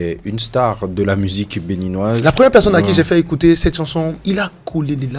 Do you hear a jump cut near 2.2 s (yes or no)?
yes